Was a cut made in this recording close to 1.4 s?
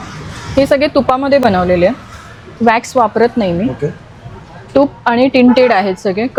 no; 0 cuts

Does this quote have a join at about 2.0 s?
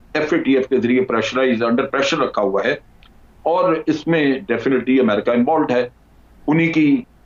no; 0 cuts

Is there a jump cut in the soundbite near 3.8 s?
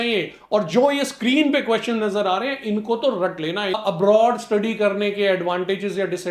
yes; 1 cut; at 3.8 s

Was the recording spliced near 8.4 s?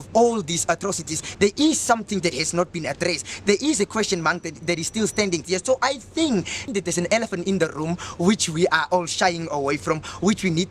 no; 3 cuts; at 1.2 s, 5.4 s, 6.6 s

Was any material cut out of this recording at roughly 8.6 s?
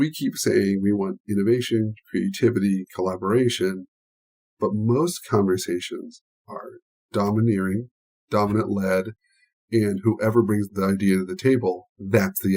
no; 0 cuts

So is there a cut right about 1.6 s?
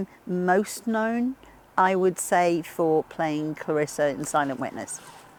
no; 0 cuts

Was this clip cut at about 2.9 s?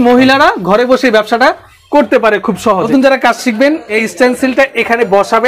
yes; 2 cuts; at 2.9 s, 3.9 s

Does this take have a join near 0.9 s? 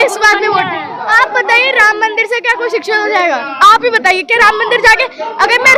yes; 1 cut; at 0.9 s

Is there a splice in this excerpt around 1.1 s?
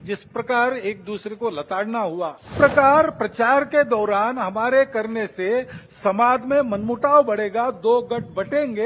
no; 1 cut; at 2.5 s

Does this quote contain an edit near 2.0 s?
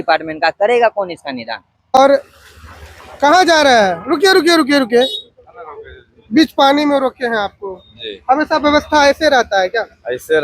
yes; 1 cut; at 2.0 s

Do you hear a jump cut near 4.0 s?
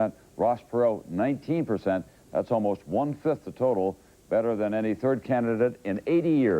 yes; 1 cut; at 4.0 s

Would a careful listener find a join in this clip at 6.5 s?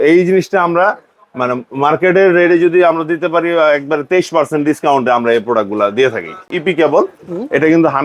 yes; 1 cut; at 6.5 s

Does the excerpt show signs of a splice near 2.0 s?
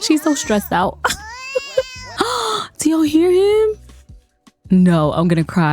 yes; 1 cut; at 2.0 s

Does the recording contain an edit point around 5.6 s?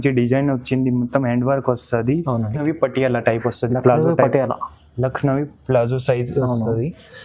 no; 1 cut; at 2.6 s

